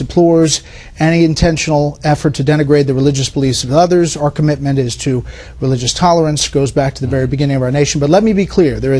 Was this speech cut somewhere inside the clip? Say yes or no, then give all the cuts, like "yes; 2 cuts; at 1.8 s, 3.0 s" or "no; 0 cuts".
yes; 1 cut; at 7.1 s